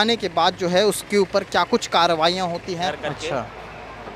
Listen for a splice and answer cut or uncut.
cut